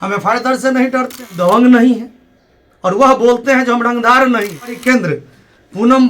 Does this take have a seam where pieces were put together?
yes; 2 cuts; at 1.6 s, 4.8 s

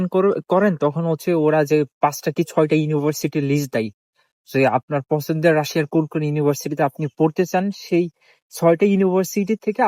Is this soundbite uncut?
yes; 0 cuts

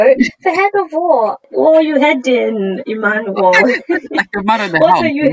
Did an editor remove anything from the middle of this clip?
yes; 1 cut; at 1.4 s

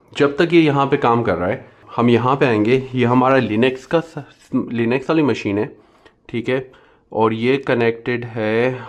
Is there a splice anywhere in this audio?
yes; 1 cut; at 1.8 s

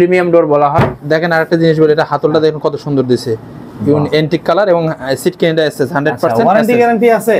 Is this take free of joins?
no; 1 cut; at 1.0 s

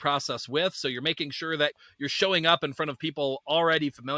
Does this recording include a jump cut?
no; 0 cuts

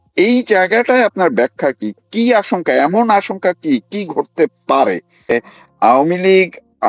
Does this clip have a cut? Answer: yes; 1 cut; at 5.3 s

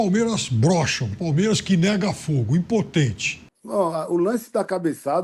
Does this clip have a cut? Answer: yes; 1 cut; at 3.4 s

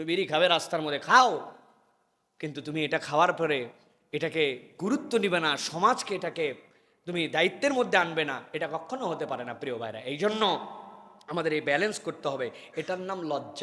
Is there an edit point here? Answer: no; 0 cuts

